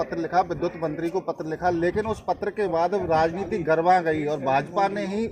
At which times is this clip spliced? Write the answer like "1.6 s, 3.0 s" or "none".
none

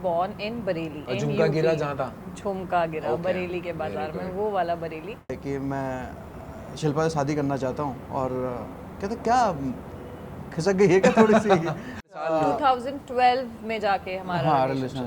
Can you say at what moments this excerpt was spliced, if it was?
1.0 s, 5.4 s, 12.1 s

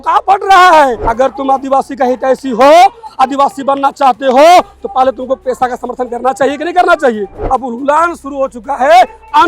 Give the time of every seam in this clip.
1.0 s, 7.4 s

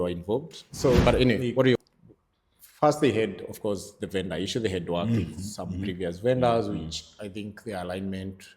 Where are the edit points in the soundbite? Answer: 1.8 s

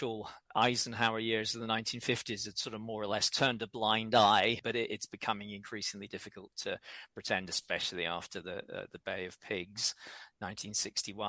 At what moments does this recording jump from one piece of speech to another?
3.3 s, 4.6 s

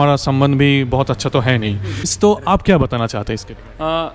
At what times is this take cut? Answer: 2.0 s

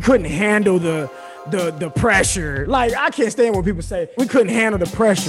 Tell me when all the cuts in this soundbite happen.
4.2 s

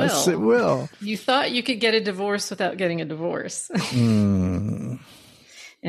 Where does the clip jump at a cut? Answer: 0.9 s

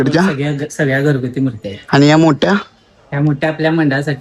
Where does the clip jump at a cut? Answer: none

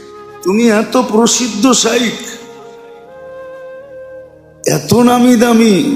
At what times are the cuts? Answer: none

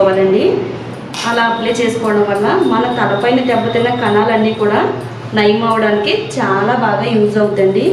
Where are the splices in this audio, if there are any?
none

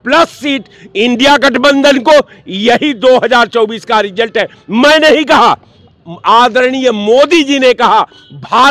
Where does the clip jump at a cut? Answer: none

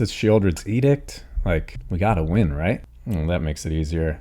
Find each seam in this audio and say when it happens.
1.8 s, 2.9 s

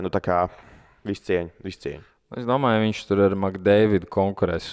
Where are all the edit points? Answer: none

